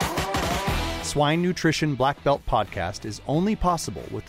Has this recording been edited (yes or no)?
yes